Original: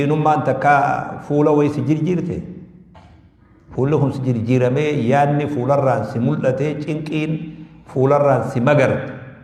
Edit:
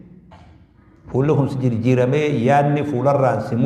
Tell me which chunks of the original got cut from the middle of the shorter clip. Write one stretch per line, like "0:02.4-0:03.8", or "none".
none